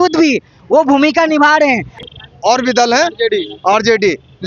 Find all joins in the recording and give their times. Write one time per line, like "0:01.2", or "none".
0:01.9